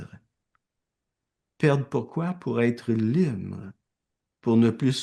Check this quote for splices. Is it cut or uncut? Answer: uncut